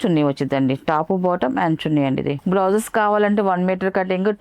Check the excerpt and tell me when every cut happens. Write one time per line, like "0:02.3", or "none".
0:02.4